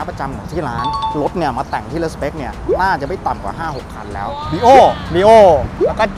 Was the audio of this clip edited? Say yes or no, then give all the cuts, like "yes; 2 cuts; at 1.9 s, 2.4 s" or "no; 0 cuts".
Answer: yes; 2 cuts; at 1.1 s, 4.4 s